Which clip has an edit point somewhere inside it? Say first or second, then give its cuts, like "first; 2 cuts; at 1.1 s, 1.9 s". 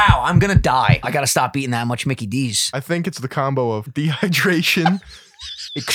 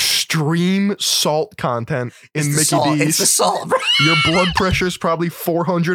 first; 3 cuts; at 1.0 s, 2.6 s, 3.9 s